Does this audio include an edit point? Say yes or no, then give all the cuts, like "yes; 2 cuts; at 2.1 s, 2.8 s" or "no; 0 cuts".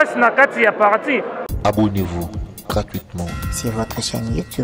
yes; 1 cut; at 1.5 s